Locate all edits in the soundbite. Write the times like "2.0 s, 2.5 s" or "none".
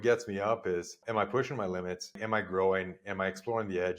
1.0 s, 2.2 s